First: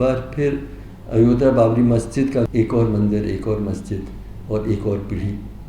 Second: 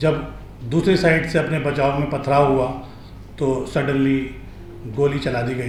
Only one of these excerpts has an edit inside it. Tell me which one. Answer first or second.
first